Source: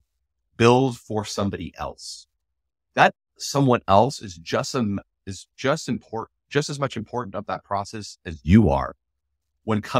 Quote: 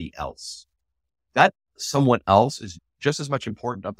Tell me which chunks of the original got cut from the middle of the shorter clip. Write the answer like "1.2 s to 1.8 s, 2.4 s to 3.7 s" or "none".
4.4 s to 6.3 s

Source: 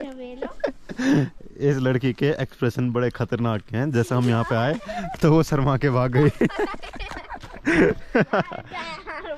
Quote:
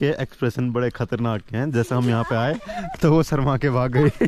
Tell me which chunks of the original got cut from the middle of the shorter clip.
none

